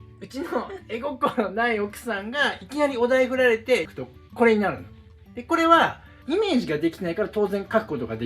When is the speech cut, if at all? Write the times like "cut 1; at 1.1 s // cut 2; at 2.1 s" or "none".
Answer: cut 1; at 3.9 s // cut 2; at 6.1 s